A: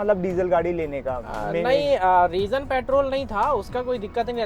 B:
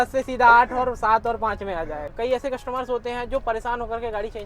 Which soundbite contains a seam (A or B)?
B